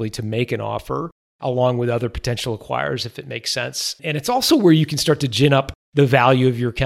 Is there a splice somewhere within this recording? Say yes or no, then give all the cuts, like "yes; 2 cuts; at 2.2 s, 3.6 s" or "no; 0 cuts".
yes; 2 cuts; at 4.0 s, 5.8 s